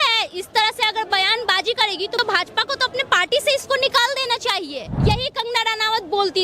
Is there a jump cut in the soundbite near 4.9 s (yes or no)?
yes